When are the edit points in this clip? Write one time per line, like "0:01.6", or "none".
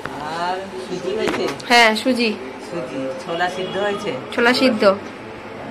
none